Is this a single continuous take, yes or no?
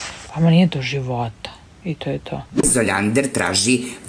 no